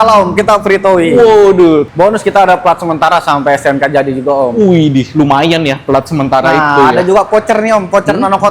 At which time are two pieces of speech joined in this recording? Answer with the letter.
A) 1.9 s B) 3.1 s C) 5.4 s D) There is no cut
A